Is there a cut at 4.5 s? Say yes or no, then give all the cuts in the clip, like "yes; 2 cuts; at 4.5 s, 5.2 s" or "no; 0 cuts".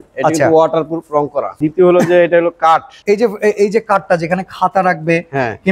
no; 2 cuts; at 1.6 s, 2.9 s